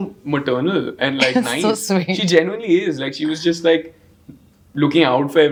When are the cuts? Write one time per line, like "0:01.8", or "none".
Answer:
none